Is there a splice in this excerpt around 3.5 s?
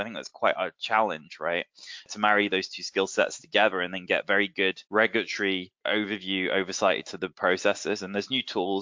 no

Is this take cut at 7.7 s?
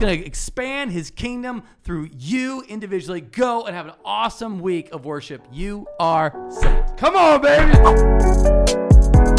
yes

